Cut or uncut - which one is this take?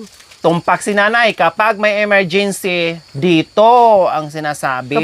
uncut